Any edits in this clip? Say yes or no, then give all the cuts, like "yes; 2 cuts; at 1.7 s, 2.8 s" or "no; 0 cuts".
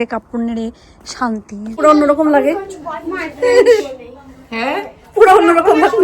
yes; 1 cut; at 1.8 s